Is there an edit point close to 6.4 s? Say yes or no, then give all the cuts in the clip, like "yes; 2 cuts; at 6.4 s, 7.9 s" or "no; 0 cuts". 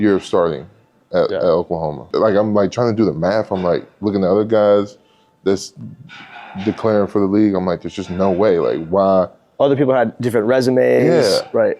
no; 1 cut; at 2.1 s